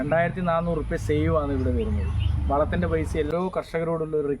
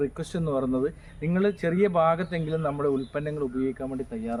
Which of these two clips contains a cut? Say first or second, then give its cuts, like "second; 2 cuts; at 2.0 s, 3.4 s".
first; 1 cut; at 3.3 s